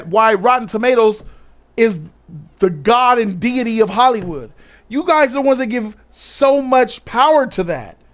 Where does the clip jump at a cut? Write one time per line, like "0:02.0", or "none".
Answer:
0:07.0